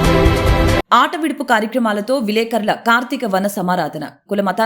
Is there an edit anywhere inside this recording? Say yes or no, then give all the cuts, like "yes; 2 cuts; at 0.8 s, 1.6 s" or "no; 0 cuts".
no; 0 cuts